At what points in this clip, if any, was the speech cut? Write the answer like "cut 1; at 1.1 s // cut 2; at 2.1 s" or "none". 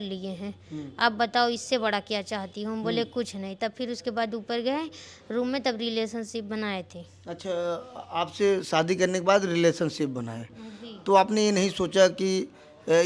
none